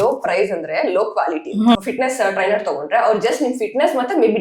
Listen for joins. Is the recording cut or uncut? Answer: cut